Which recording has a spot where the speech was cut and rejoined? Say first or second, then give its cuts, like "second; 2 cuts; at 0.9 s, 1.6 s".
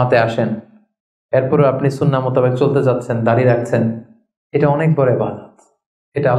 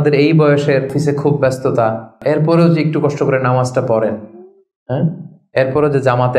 second; 2 cuts; at 0.9 s, 2.2 s